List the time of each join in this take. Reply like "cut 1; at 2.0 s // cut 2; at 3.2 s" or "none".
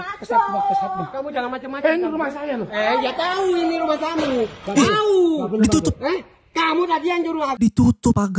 none